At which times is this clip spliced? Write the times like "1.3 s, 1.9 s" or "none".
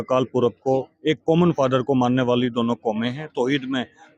none